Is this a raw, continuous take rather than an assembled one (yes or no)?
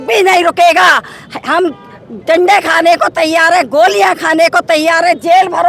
yes